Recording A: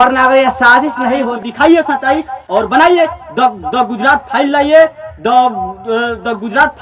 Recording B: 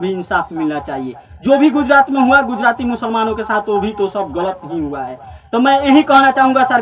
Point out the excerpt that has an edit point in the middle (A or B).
A